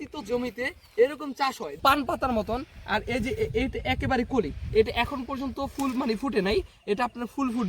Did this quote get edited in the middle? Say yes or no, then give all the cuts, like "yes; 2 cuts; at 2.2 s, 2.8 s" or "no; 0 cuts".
yes; 1 cut; at 1.7 s